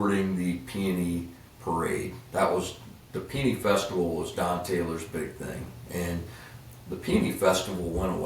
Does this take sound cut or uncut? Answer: uncut